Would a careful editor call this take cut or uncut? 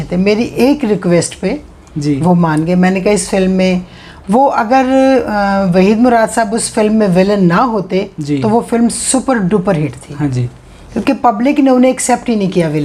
uncut